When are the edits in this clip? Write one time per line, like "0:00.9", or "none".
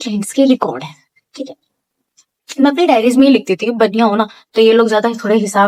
none